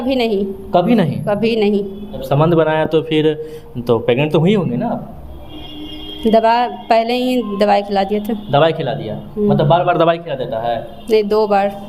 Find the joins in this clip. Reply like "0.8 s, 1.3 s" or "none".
2.2 s